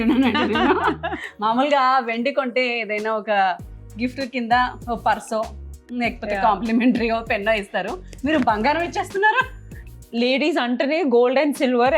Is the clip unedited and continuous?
yes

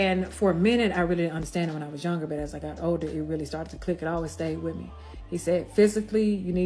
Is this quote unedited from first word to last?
yes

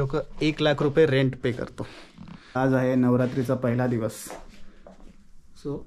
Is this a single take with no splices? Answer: no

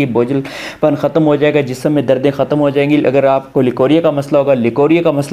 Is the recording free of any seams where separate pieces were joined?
yes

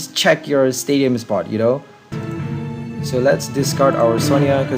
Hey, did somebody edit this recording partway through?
yes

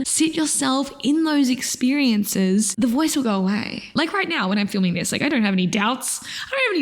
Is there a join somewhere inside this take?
yes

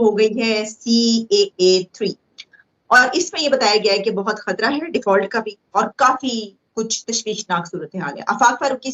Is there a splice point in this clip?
no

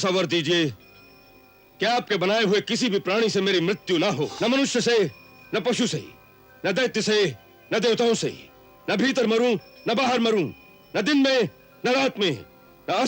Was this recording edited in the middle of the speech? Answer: yes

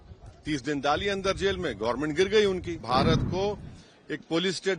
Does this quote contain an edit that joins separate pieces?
yes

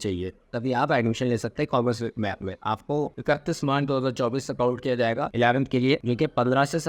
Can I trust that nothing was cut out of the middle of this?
no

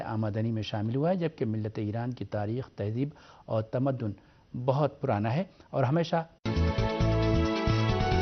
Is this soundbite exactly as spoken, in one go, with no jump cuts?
yes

